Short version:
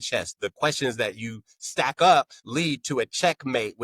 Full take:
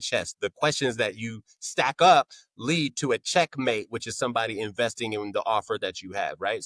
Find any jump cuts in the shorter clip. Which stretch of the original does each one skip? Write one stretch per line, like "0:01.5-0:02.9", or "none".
0:02.4-0:02.5